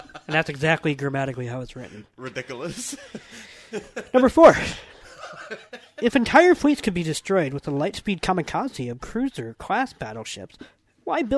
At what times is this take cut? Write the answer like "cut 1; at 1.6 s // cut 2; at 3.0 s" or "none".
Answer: none